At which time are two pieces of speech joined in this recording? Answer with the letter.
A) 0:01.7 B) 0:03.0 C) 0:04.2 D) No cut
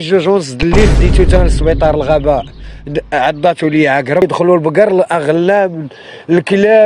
C